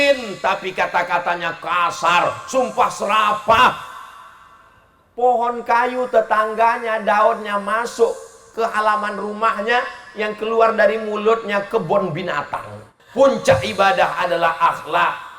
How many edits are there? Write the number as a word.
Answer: one